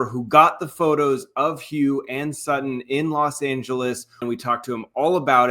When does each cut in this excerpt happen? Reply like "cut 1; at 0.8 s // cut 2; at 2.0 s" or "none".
cut 1; at 4.2 s